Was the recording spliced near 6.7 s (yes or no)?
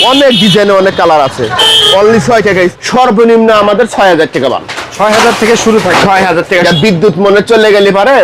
yes